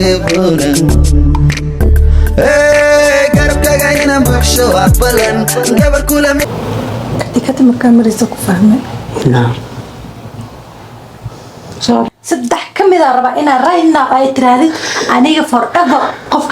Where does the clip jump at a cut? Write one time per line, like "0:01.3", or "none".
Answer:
0:12.1